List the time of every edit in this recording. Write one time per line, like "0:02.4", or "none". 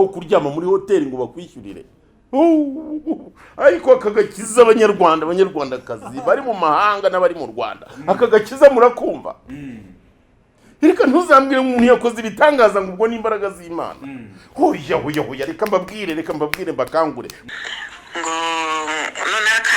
0:17.4

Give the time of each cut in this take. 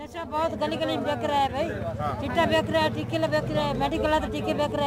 none

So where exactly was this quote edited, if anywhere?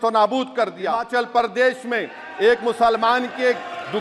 0:01.1

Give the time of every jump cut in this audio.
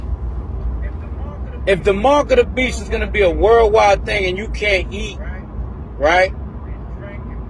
0:04.0

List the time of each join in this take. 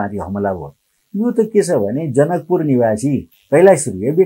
0:03.3

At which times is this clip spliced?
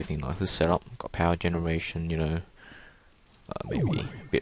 none

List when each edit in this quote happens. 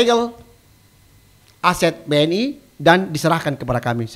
none

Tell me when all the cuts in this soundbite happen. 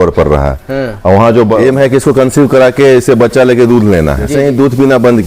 0:01.6
0:04.3

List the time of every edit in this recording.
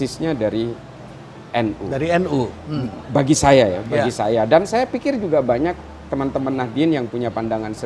none

